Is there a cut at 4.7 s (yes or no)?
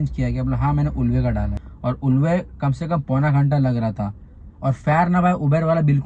no